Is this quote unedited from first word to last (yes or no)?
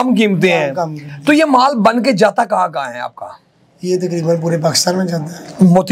yes